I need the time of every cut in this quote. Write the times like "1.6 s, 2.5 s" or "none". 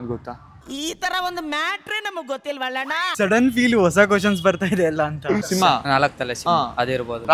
3.1 s, 5.4 s

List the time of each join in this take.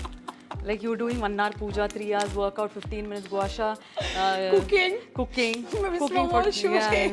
none

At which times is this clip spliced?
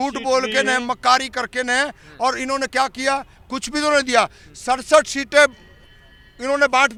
none

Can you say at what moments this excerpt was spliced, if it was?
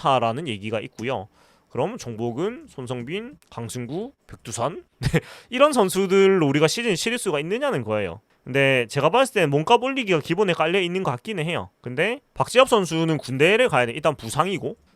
none

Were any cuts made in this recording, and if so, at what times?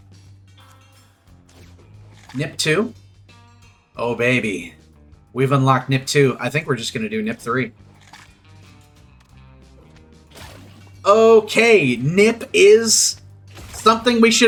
none

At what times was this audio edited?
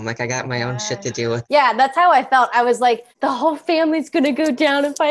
1.4 s, 3.1 s

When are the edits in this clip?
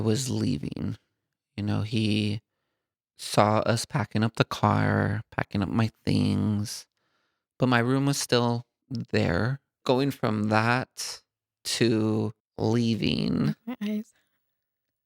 8.8 s, 9.8 s, 12.4 s

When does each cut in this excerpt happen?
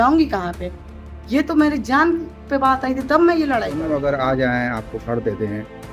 3.8 s

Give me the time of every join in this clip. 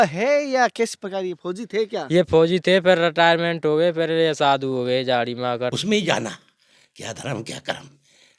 5.8 s

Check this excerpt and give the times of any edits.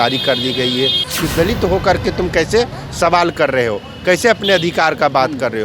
1.0 s

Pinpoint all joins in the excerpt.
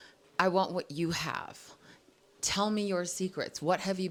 none

